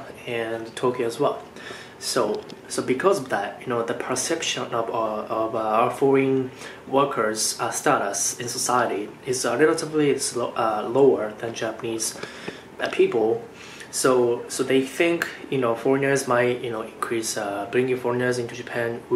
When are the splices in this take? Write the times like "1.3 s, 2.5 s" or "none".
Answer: none